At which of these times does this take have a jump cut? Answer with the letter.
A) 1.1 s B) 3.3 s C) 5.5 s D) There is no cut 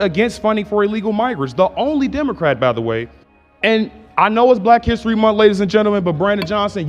B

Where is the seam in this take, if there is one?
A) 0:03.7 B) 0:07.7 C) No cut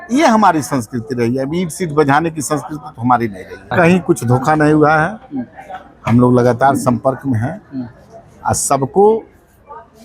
A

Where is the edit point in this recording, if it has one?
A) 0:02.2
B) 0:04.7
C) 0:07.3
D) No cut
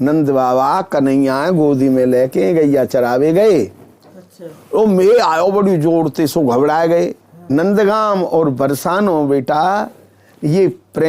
C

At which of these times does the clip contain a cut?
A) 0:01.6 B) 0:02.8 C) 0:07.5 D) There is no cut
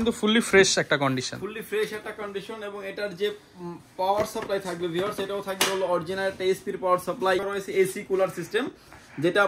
C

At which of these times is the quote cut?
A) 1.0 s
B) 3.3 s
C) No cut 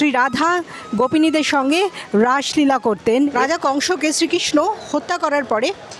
B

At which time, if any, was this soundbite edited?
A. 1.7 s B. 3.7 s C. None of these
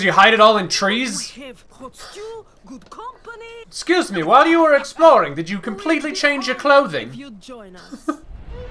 B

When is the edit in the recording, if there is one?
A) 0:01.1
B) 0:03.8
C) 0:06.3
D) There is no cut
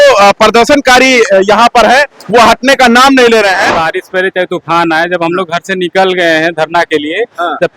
B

